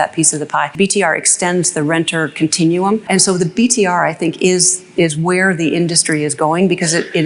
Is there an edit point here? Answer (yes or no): yes